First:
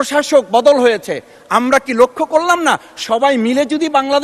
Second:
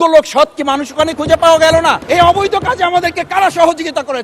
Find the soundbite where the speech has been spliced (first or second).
second